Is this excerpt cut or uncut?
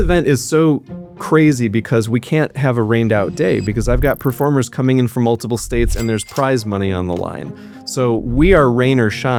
uncut